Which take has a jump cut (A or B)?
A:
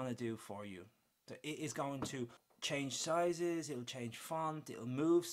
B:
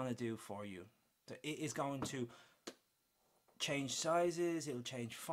A